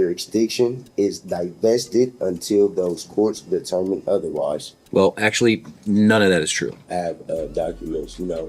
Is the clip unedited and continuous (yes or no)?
no